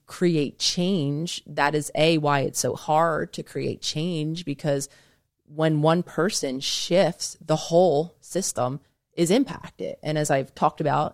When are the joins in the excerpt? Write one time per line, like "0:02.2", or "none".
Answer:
none